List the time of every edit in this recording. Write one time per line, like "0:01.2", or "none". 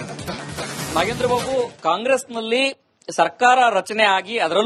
0:00.9